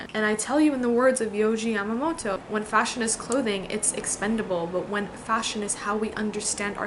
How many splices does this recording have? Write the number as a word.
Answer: one